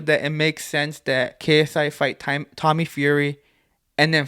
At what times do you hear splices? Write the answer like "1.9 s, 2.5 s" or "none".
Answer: none